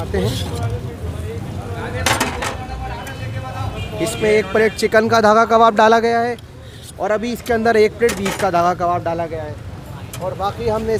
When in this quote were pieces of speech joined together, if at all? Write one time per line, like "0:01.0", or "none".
none